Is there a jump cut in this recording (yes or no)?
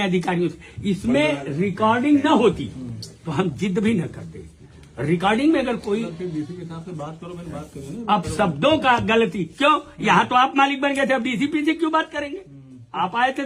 no